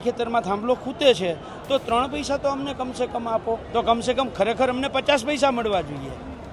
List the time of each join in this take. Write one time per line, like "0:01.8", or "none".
0:03.6